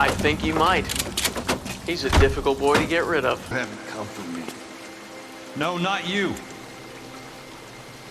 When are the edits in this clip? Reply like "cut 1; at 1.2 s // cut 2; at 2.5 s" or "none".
cut 1; at 3.5 s